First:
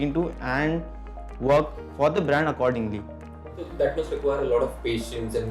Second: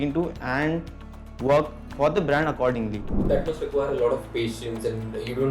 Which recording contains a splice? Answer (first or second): second